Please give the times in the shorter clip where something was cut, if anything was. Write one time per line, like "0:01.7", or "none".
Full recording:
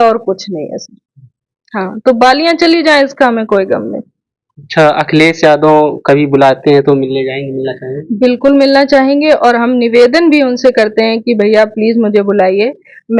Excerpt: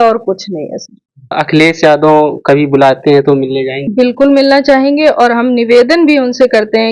0:01.3
0:03.8

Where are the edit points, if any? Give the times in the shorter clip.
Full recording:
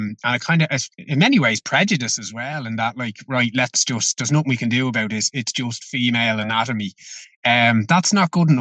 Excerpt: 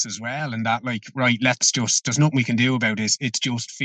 none

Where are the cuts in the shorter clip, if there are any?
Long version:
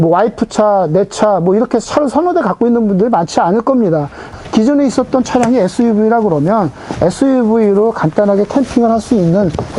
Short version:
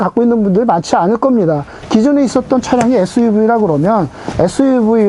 0:01.7

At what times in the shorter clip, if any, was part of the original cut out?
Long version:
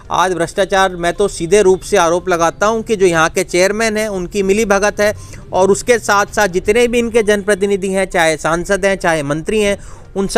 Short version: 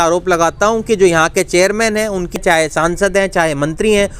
0:02.4

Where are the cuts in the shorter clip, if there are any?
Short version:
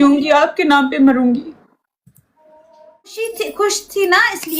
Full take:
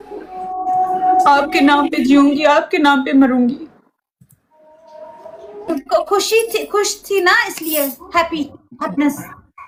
0:03.1

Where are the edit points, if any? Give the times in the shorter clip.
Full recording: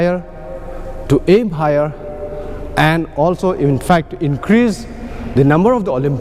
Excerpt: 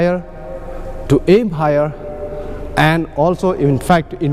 none

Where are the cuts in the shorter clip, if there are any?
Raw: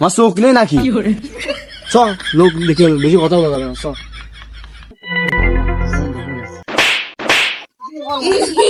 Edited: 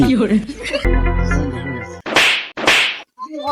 0:00.9

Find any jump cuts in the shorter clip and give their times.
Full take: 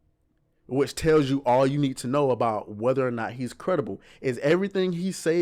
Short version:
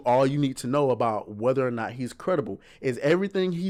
none

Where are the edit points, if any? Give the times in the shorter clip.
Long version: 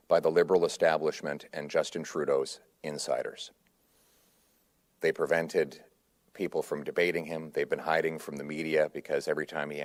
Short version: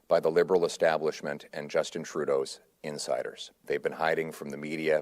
0:03.6

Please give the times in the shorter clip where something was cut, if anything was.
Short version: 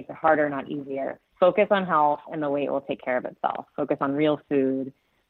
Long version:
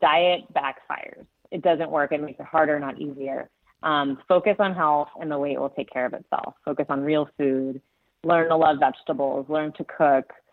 0:01.3

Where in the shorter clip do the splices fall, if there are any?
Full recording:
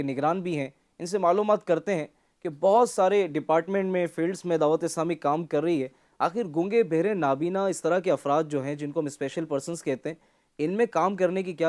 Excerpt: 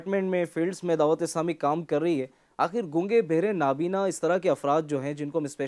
none

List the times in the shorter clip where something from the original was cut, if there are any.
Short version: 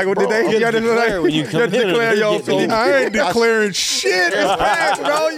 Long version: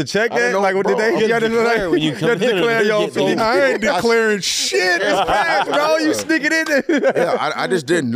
none

